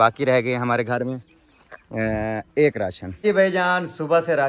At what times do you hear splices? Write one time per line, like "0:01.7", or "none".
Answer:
0:03.2